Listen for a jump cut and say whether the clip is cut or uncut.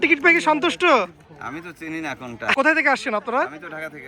cut